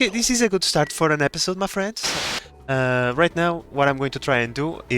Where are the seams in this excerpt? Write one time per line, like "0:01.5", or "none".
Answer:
0:02.1